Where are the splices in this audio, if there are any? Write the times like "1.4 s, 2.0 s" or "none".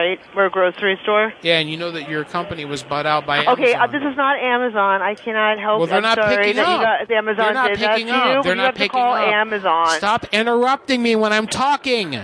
2.0 s